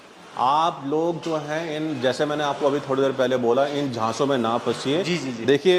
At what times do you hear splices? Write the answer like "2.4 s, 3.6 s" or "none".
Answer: none